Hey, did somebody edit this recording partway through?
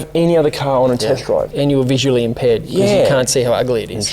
yes; 1 cut; at 1.5 s

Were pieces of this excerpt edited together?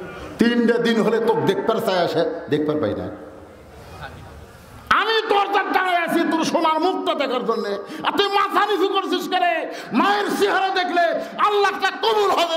no; 0 cuts

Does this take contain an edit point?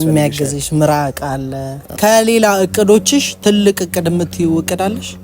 yes; 1 cut; at 2.0 s

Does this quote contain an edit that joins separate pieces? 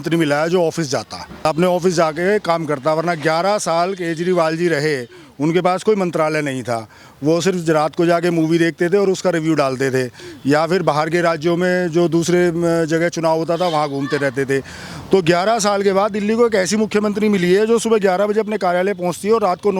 yes; 1 cut; at 1.4 s

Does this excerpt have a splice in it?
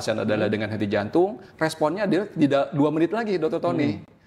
no; 0 cuts

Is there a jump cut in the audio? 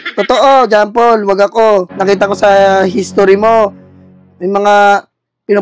yes; 1 cut; at 1.9 s

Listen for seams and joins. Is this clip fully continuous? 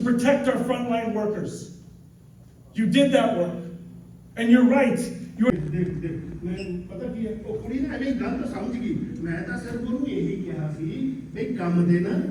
yes; 0 cuts

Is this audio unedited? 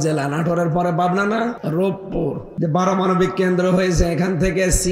no; 2 cuts; at 1.6 s, 2.5 s

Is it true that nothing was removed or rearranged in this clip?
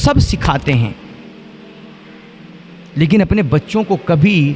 yes; 0 cuts

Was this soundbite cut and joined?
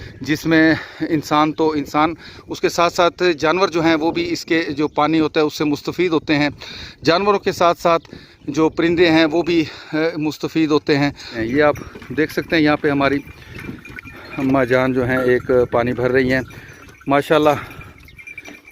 yes; 1 cut; at 11.4 s

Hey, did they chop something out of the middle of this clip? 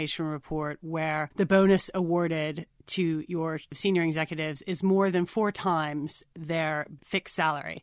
yes; 3 cuts; at 1.3 s, 3.7 s, 6.9 s

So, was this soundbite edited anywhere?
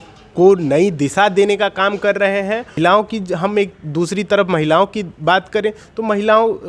yes; 1 cut; at 2.7 s

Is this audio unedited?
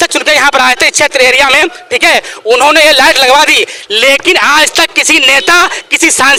yes; 0 cuts

